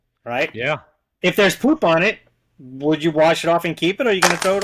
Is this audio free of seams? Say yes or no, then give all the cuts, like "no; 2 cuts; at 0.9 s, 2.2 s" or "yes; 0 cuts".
yes; 0 cuts